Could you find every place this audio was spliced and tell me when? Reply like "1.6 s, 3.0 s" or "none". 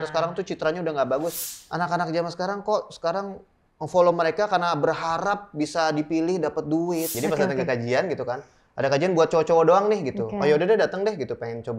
1.5 s, 7.1 s